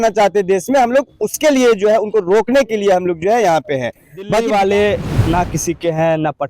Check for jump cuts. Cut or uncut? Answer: cut